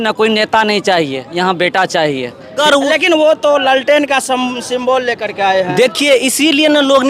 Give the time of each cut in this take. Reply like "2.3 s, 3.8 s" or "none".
2.6 s